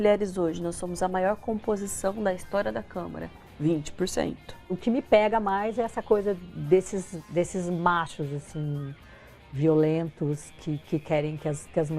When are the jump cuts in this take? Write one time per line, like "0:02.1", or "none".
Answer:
0:04.8